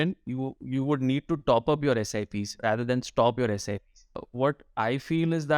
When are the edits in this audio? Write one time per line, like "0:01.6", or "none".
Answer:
0:04.2